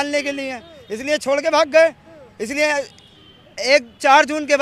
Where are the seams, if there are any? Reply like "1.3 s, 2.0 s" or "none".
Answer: none

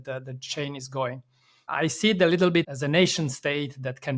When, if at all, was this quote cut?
1.7 s, 2.7 s

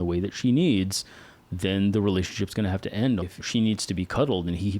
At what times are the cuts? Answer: 3.3 s

